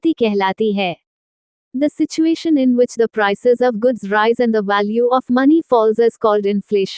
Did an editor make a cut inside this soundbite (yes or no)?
no